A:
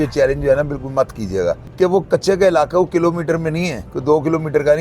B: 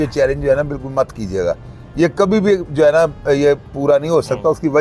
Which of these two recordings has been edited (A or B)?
A